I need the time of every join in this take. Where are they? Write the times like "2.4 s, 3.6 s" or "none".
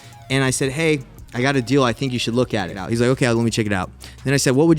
2.8 s